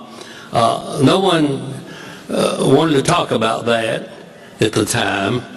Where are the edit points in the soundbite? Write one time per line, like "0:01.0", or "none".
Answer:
0:02.6